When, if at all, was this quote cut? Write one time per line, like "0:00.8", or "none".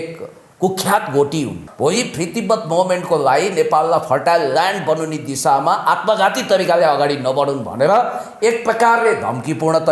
0:01.6